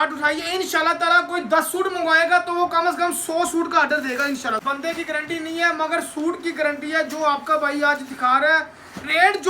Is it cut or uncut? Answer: cut